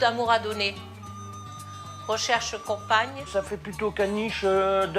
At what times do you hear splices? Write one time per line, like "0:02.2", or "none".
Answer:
0:03.3